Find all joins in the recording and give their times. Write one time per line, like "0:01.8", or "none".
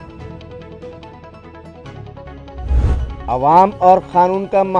0:03.2